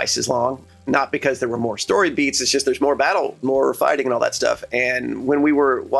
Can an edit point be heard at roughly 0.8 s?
yes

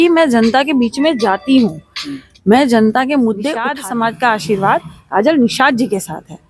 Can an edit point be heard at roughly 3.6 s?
yes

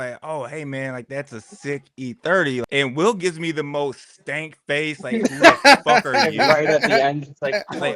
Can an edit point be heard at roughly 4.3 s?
no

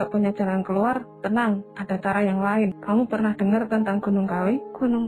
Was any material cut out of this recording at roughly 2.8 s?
yes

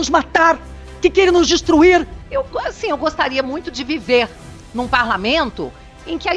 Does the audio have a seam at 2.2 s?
yes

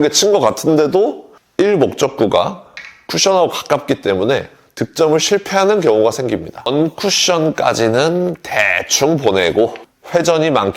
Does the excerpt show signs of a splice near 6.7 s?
yes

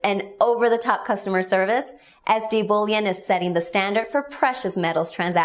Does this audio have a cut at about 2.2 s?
no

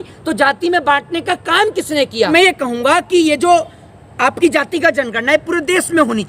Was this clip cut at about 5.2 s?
no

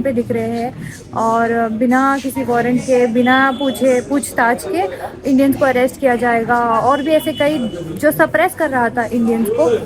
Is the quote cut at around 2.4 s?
no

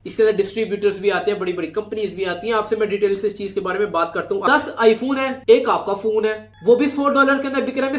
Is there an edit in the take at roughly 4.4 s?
yes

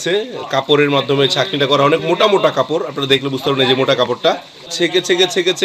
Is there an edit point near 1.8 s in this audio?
no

